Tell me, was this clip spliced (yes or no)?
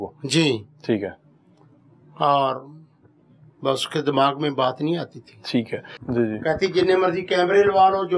yes